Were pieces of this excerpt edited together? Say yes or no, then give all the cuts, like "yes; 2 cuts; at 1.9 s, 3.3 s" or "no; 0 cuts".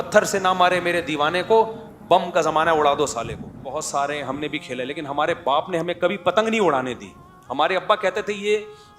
yes; 1 cut; at 3.7 s